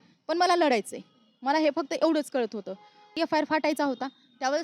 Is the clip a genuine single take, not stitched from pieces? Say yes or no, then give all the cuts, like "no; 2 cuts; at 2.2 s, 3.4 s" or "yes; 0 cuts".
no; 1 cut; at 3.2 s